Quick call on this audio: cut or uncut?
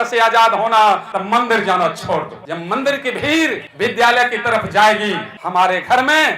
cut